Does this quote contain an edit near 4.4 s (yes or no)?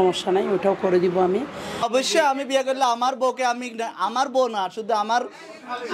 no